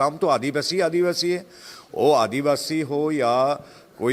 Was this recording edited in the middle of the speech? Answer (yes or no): no